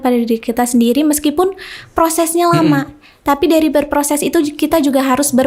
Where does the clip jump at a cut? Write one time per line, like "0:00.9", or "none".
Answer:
none